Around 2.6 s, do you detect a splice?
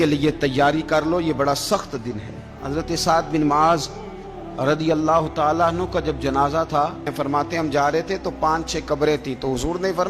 yes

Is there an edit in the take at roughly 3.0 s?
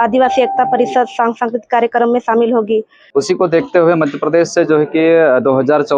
yes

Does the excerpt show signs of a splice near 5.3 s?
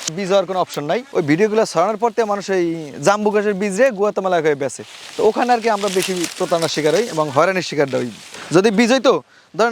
no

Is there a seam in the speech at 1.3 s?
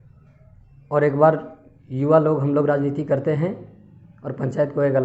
no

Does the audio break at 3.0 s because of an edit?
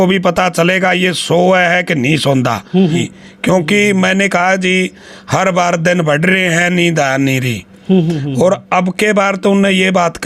yes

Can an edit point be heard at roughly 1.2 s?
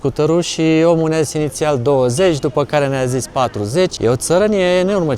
no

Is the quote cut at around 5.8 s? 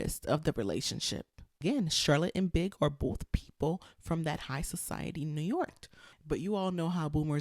yes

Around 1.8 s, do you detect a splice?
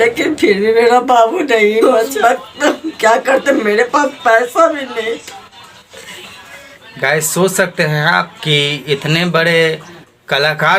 yes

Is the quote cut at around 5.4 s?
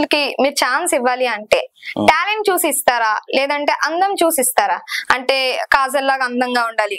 no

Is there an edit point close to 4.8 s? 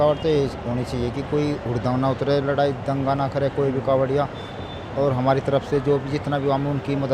no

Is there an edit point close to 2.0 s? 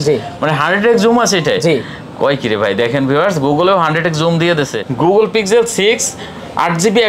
no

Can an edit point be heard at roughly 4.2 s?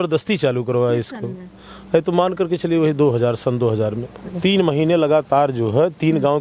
yes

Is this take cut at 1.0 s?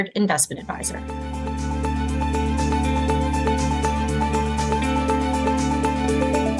yes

